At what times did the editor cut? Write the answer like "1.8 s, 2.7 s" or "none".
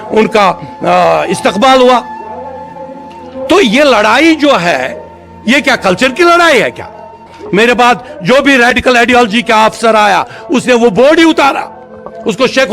7.3 s